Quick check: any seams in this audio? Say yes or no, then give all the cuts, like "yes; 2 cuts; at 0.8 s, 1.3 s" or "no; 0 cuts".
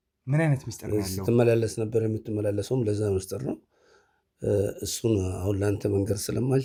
no; 0 cuts